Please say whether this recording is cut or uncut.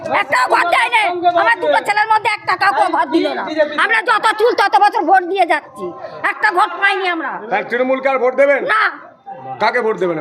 uncut